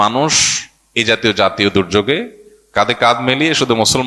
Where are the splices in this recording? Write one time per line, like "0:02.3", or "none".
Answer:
none